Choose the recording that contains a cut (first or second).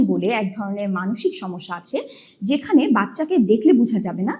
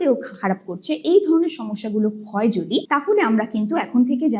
second